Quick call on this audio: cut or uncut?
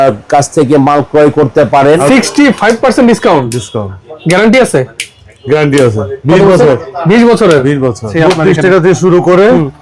cut